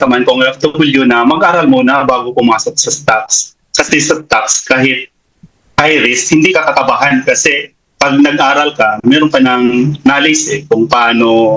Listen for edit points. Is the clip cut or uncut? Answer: uncut